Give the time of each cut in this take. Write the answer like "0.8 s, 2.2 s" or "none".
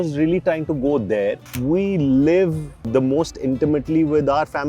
1.5 s, 2.8 s